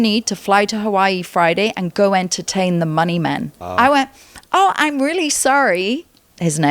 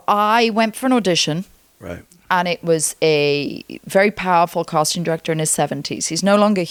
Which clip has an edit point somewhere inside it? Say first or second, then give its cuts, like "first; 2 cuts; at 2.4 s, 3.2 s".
first; 1 cut; at 3.6 s